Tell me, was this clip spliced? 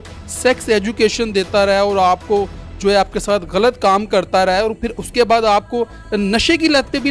no; 0 cuts

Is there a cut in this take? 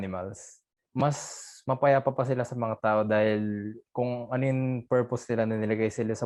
no; 0 cuts

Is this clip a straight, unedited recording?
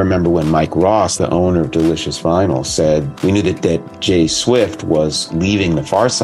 yes; 0 cuts

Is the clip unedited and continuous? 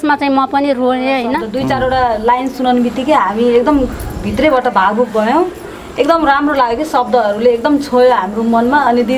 no; 1 cut; at 1.5 s

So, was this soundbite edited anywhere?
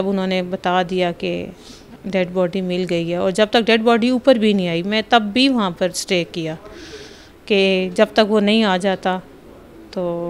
no; 0 cuts

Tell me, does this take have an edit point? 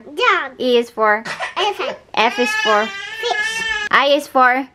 yes; 1 cut; at 3.7 s

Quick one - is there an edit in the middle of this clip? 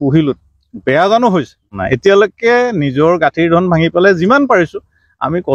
yes; 1 cut; at 1.8 s

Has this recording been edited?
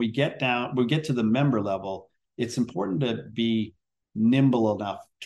no; 0 cuts

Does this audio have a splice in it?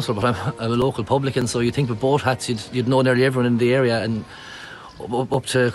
no; 0 cuts

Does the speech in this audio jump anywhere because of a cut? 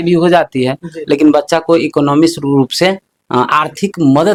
no; 0 cuts

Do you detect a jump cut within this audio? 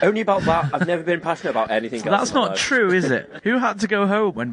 yes; 1 cut; at 3.3 s

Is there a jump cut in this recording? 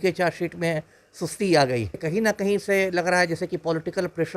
yes; 1 cut; at 2.0 s

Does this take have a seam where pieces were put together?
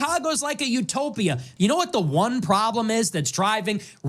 yes; 1 cut; at 1.4 s

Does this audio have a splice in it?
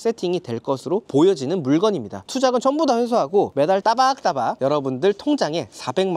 yes; 1 cut; at 2.2 s

